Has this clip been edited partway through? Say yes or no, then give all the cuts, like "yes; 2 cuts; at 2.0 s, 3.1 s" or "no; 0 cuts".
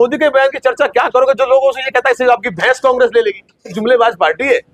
yes; 1 cut; at 3.8 s